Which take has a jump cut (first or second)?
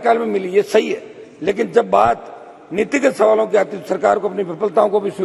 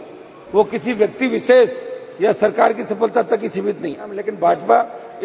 second